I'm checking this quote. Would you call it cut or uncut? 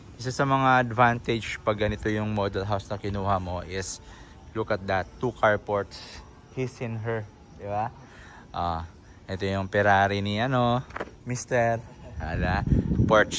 uncut